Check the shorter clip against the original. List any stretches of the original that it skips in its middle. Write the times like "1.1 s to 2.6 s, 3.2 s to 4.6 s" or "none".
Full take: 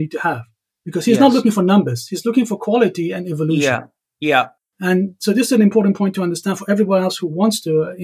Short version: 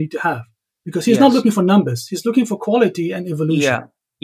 none